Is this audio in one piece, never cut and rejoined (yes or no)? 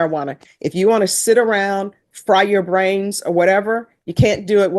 yes